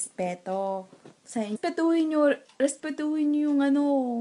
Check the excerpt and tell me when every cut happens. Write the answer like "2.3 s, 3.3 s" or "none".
none

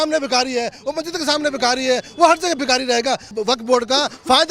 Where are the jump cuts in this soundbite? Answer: 3.3 s

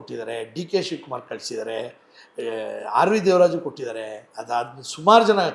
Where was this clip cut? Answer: none

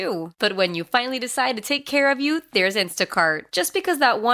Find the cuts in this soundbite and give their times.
none

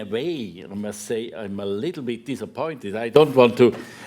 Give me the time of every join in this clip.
none

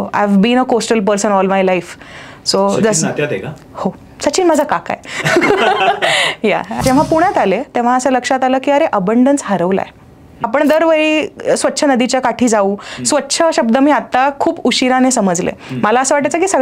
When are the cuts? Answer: 6.8 s, 10.4 s

